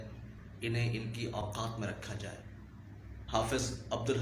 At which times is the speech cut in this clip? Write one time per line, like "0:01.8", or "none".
0:02.9